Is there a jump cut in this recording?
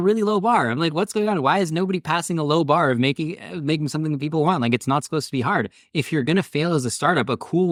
no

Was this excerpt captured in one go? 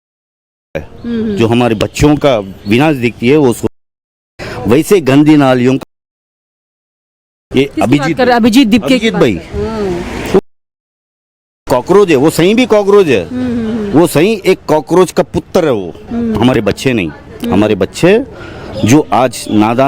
yes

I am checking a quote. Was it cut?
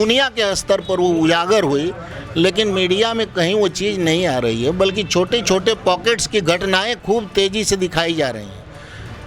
no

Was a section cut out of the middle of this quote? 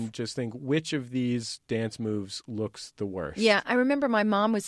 no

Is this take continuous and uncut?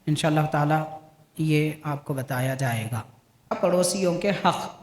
no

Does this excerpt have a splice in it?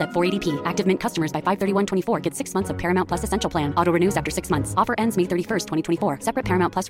no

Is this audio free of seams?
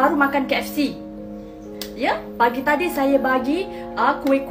yes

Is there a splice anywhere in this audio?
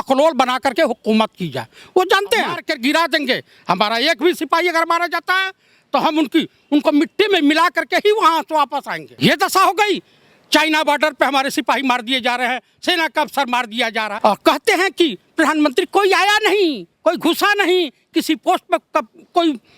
yes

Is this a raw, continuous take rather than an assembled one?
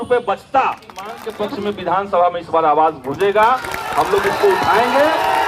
no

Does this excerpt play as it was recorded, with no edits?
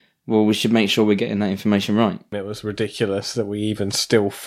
no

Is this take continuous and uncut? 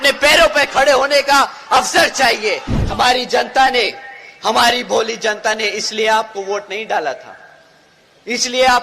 no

